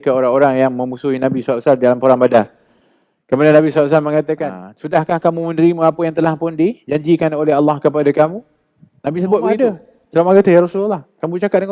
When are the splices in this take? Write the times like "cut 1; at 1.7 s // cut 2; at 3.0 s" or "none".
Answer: cut 1; at 4.3 s // cut 2; at 9.6 s

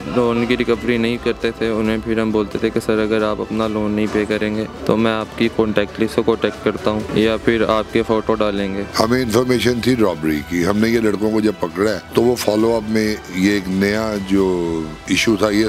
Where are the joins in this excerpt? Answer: cut 1; at 4.7 s // cut 2; at 7.1 s // cut 3; at 8.8 s // cut 4; at 12.0 s

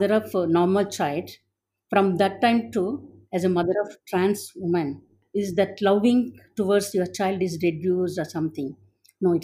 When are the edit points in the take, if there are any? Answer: cut 1; at 5.2 s

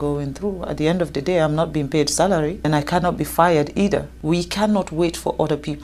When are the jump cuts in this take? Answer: cut 1; at 2.7 s // cut 2; at 4.1 s

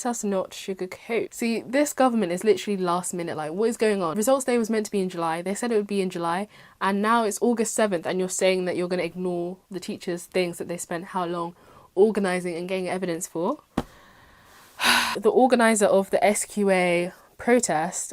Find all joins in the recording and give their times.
cut 1; at 1.3 s // cut 2; at 4.1 s // cut 3; at 15.2 s

